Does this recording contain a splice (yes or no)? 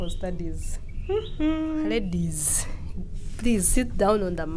yes